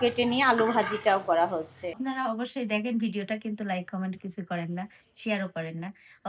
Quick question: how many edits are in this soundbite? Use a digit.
1